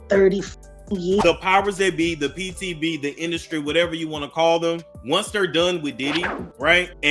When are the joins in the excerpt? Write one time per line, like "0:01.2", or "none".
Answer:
0:01.0